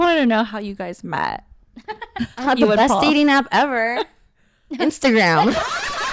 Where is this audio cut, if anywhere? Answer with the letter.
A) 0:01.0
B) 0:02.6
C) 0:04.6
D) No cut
D